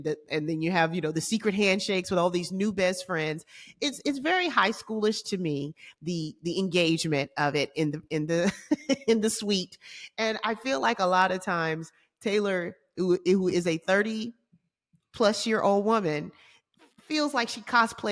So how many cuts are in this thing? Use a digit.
0